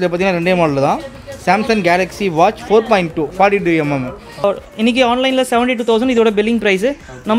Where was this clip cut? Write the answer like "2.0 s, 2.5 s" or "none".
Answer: 4.4 s